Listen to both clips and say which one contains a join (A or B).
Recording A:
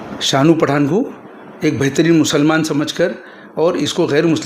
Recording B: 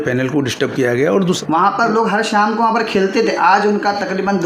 B